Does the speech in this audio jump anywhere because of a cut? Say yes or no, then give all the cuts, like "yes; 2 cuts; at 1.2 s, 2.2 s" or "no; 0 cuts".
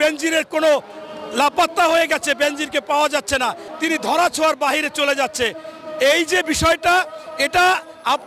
yes; 1 cut; at 3.7 s